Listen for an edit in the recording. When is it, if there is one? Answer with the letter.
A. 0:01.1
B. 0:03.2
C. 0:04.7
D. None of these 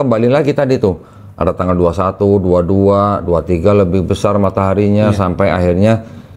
D